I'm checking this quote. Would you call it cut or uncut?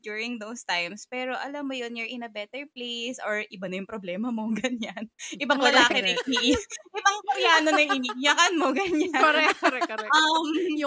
uncut